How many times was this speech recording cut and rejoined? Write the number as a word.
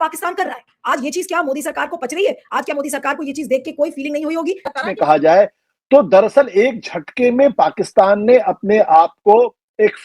one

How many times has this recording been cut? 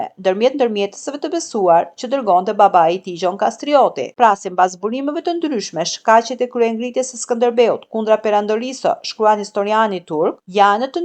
one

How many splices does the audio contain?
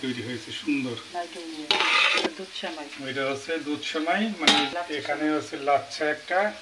two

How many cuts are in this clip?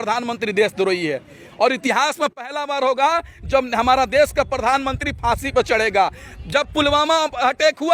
zero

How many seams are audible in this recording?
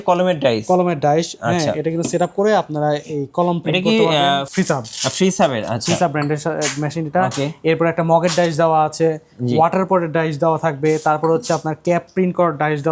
zero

